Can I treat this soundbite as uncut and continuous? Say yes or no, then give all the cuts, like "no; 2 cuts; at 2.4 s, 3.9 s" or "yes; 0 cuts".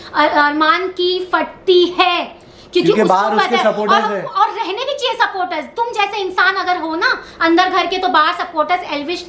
yes; 0 cuts